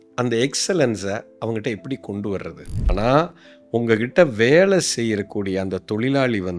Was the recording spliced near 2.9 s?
yes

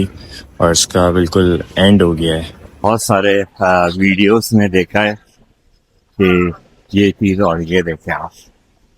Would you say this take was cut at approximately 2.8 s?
yes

